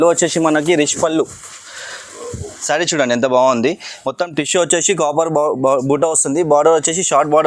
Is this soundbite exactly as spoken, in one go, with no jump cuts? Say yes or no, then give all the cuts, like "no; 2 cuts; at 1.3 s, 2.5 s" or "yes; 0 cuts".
no; 1 cut; at 2.5 s